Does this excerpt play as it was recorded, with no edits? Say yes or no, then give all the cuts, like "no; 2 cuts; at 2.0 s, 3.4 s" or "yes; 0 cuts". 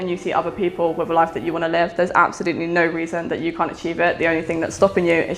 yes; 0 cuts